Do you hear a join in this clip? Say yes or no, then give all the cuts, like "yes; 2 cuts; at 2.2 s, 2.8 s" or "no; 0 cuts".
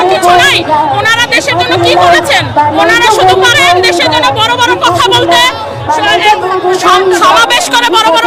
no; 0 cuts